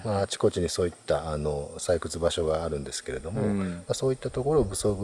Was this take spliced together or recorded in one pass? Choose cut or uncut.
uncut